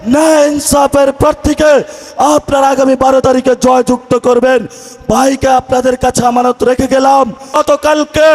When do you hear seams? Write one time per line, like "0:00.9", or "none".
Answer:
0:07.4